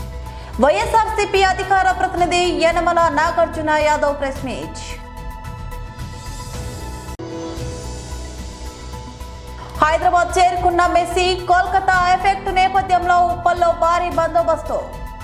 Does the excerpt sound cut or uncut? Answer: uncut